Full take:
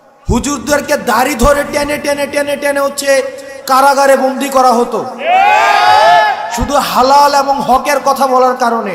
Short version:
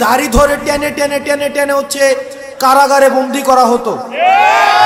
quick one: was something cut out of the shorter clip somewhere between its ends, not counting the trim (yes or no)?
no